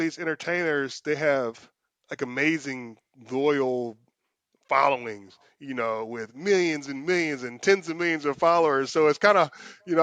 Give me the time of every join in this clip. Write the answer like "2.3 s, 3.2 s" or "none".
none

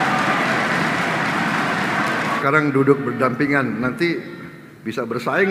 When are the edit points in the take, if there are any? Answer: 2.4 s

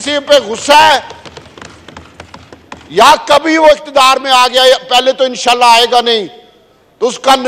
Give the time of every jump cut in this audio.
none

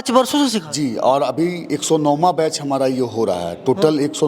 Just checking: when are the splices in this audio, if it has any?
none

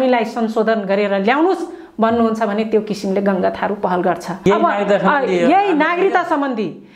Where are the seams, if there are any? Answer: 4.5 s

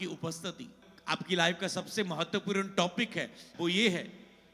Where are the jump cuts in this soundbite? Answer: 0.9 s, 3.5 s

